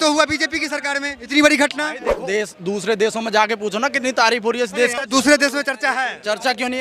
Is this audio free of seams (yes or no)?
no